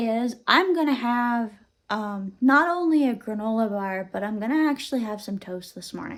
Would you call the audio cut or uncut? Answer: uncut